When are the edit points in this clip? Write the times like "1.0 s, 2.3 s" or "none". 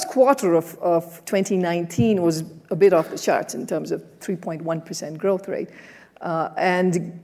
none